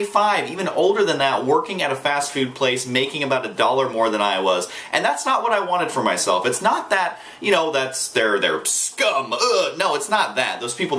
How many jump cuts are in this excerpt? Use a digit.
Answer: 1